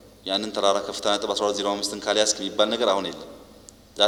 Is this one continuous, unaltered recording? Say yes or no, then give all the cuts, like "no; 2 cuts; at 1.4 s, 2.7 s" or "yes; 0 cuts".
yes; 0 cuts